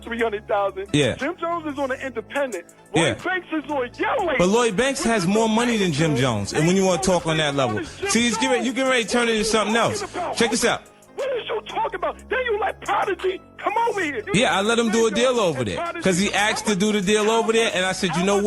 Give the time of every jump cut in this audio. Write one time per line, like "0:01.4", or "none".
none